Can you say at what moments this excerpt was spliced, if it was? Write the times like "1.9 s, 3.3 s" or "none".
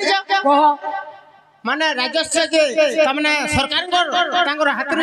none